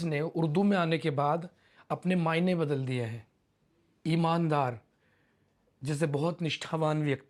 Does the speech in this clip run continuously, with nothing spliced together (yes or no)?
yes